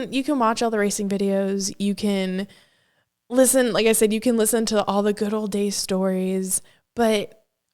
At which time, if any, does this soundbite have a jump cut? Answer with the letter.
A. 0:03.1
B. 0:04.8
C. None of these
C